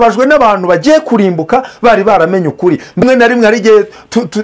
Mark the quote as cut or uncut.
cut